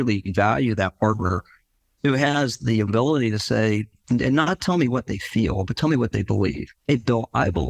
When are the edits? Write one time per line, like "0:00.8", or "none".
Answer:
0:04.0